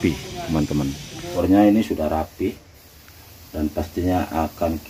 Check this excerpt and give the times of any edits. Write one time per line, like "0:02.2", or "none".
0:01.1